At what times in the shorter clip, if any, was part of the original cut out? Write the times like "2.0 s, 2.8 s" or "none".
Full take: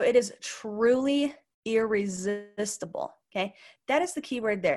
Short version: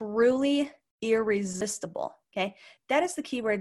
1.6 s